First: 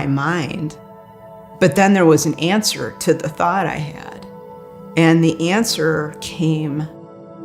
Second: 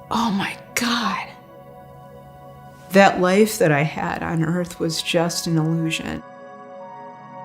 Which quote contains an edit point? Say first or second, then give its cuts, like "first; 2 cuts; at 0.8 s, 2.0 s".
second; 1 cut; at 6.3 s